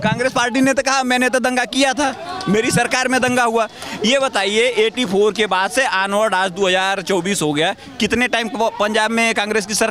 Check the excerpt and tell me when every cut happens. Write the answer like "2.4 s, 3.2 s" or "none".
none